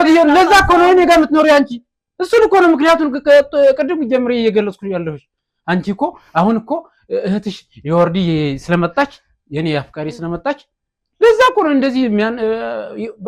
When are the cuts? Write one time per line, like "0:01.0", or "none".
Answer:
none